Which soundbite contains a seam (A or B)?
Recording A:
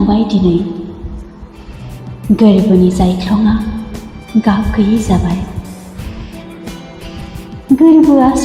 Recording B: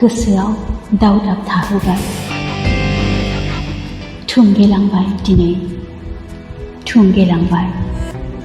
B